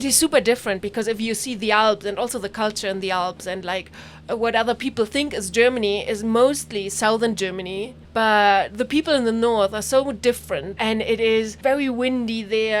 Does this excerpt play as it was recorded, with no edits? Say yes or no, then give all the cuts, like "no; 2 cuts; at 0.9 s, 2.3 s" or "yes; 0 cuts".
no; 3 cuts; at 8.0 s, 10.8 s, 11.5 s